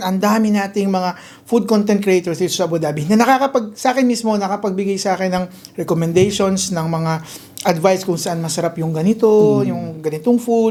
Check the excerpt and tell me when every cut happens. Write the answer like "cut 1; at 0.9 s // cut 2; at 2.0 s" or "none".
none